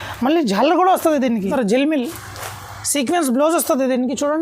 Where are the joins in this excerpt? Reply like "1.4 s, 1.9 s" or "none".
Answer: 1.5 s